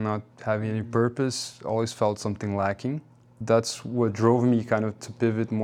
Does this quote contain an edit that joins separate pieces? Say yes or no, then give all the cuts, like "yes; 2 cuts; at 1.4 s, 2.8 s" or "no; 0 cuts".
yes; 1 cut; at 3.4 s